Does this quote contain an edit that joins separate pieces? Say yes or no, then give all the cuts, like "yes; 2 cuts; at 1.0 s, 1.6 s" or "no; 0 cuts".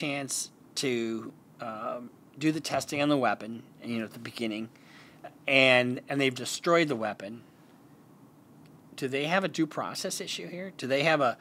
no; 0 cuts